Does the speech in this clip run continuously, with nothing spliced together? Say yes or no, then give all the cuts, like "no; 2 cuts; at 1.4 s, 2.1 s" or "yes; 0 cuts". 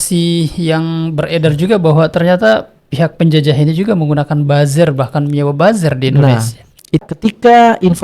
no; 1 cut; at 7.0 s